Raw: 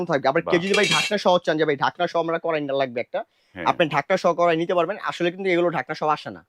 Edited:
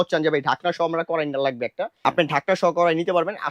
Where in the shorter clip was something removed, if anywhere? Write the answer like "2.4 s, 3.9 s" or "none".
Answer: 1.9 s